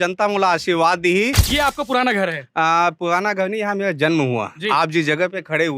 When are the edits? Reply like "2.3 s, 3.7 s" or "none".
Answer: 1.4 s